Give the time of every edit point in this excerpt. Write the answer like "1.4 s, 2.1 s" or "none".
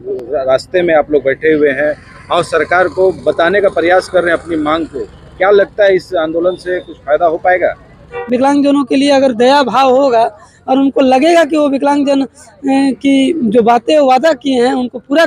8.2 s